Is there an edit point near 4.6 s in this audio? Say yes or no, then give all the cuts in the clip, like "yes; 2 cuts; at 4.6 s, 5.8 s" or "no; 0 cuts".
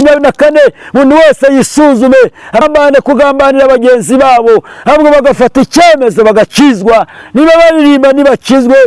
no; 1 cut; at 2.6 s